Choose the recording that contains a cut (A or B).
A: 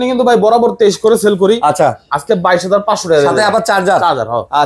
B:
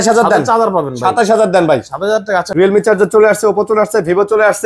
B